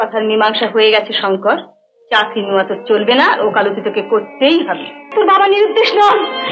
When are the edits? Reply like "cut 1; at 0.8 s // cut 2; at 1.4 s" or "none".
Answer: cut 1; at 5.0 s